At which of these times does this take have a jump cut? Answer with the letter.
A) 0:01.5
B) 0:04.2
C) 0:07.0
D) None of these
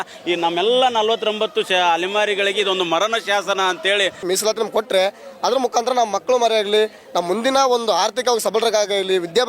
B